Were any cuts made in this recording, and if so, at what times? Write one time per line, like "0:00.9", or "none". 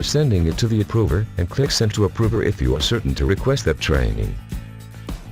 0:04.3